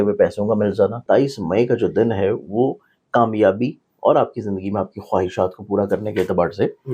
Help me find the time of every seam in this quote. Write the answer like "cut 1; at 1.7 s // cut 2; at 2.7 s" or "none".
cut 1; at 1.0 s